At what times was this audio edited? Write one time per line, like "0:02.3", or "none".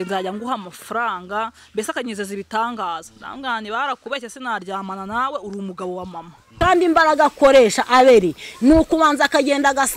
0:06.5